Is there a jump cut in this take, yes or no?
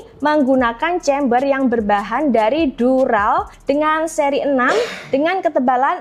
no